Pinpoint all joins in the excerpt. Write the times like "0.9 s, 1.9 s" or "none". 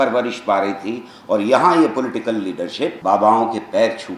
3.0 s